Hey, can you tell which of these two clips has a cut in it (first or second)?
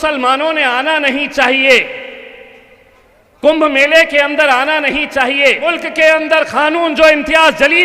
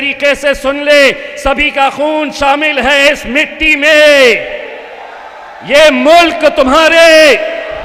first